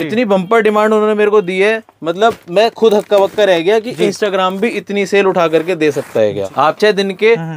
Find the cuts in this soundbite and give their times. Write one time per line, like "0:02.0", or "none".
0:06.5